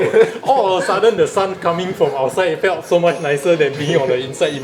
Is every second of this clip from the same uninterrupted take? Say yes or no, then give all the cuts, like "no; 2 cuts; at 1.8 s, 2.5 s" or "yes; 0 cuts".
yes; 0 cuts